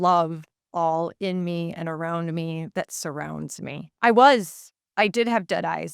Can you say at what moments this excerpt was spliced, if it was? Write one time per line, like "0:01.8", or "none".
0:03.9